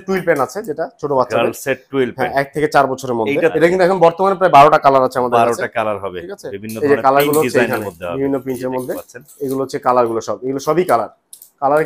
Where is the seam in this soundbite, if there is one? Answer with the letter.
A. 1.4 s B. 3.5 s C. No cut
B